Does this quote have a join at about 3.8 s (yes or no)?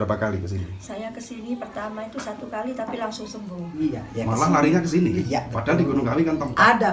yes